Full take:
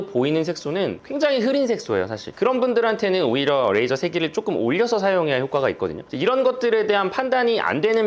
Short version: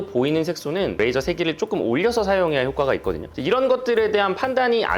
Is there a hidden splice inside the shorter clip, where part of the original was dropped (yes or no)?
yes